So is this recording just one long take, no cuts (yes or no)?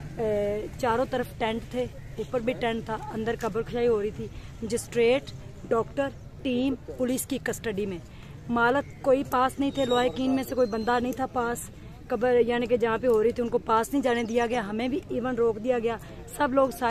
yes